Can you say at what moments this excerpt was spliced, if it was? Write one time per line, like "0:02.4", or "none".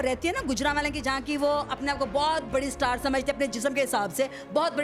none